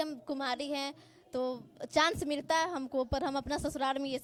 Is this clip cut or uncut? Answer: uncut